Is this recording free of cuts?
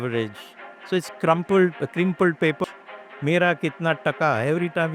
no; 1 cut; at 2.6 s

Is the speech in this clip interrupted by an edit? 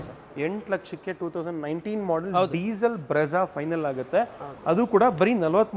no; 0 cuts

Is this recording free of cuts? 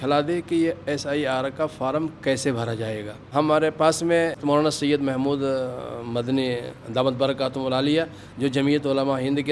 no; 2 cuts; at 3.3 s, 4.4 s

